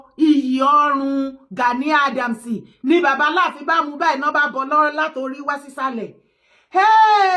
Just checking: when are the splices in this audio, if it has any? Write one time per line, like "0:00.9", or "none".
none